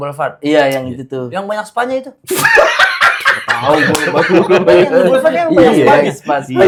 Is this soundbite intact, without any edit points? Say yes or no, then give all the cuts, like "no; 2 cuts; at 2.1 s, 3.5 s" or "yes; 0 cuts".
yes; 0 cuts